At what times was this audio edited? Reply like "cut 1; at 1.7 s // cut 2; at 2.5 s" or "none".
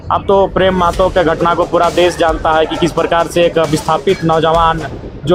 none